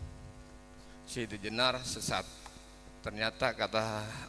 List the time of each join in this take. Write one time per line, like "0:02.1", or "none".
none